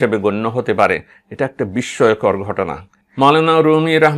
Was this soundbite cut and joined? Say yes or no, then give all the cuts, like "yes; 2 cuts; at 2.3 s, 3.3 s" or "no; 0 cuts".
no; 0 cuts